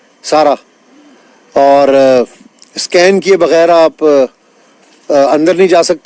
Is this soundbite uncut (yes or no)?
yes